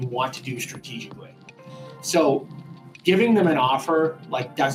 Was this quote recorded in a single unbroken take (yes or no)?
yes